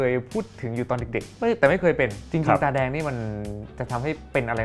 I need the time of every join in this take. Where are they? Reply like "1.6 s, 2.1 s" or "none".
1.3 s, 2.2 s, 3.8 s